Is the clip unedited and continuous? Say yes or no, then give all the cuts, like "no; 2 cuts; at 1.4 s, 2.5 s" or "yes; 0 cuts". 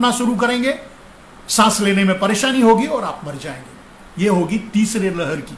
yes; 0 cuts